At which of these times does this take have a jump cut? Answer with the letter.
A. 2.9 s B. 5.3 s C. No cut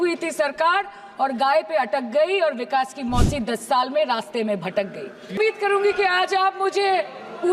B